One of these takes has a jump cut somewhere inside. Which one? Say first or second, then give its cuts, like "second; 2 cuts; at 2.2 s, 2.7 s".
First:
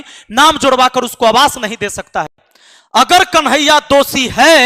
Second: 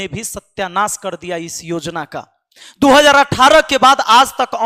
first; 1 cut; at 2.4 s